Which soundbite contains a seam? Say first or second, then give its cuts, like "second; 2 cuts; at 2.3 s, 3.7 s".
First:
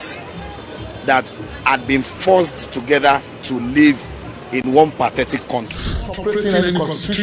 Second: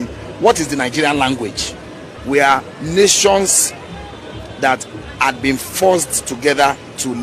first; 1 cut; at 6.1 s